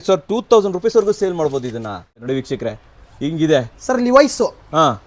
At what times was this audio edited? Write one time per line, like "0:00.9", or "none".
0:02.2